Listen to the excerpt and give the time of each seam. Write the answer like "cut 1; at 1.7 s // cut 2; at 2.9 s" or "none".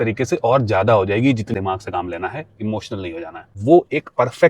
cut 1; at 1.5 s // cut 2; at 3.6 s